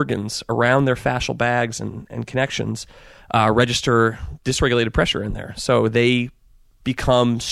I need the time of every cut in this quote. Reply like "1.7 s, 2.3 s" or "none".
4.3 s